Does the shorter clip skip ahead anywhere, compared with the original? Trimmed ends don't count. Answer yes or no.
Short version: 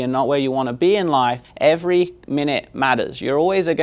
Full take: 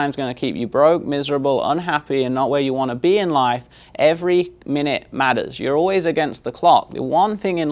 yes